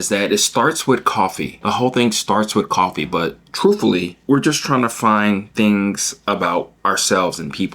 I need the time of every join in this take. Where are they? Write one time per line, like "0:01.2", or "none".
0:01.5
0:04.1
0:06.7